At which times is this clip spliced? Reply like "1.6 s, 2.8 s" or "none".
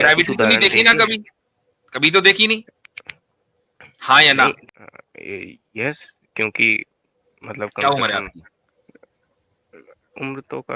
4.6 s